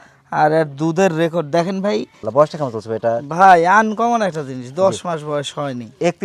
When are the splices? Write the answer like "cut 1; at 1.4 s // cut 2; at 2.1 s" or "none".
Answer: cut 1; at 2.2 s